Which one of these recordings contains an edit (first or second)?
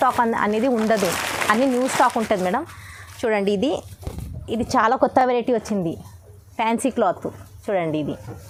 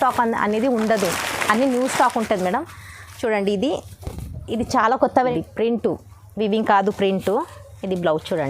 second